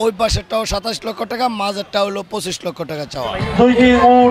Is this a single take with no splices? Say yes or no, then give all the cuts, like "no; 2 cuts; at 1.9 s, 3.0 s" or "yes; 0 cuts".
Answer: no; 1 cut; at 3.4 s